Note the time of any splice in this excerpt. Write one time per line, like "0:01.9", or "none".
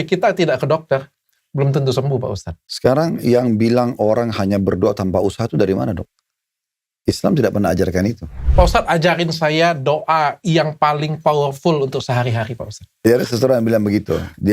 0:02.8
0:08.4
0:13.0